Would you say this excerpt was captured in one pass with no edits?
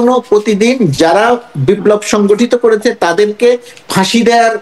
yes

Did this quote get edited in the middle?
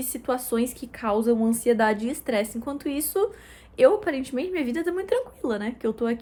no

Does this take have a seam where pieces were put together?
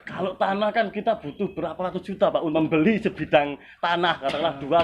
yes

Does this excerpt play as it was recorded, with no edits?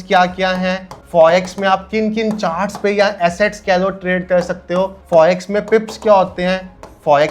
yes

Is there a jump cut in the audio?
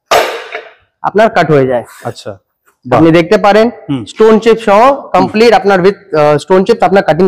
no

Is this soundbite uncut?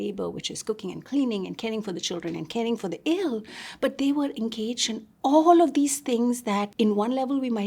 no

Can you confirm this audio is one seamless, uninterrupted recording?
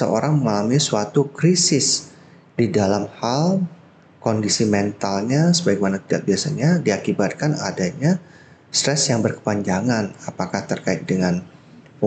yes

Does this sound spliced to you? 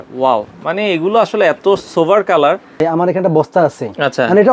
yes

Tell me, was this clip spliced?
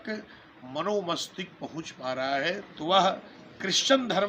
yes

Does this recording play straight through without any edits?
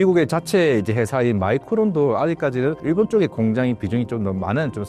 yes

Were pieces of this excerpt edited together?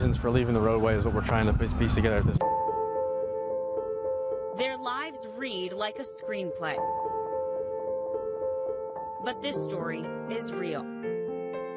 yes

